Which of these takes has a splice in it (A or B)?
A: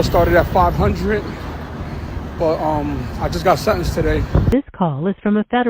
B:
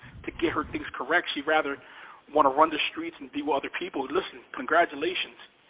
A